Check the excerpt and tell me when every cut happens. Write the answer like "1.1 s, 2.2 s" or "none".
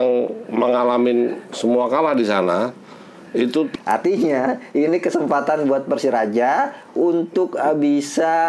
3.7 s